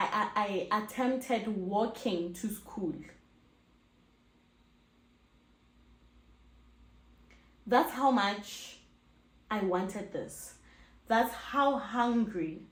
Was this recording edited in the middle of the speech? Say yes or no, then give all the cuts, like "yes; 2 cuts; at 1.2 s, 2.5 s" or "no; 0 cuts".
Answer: no; 0 cuts